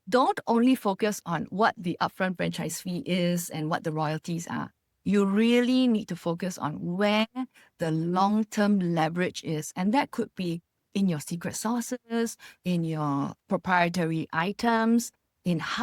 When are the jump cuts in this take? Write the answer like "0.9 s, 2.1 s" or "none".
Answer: none